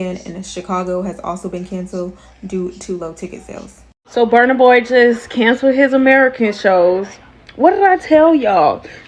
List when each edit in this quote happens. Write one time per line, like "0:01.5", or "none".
0:04.0